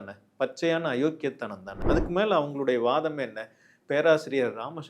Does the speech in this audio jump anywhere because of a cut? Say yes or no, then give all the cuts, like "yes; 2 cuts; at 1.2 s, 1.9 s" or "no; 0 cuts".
yes; 1 cut; at 1.8 s